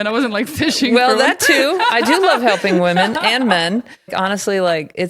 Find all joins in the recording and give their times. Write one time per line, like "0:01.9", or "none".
0:04.1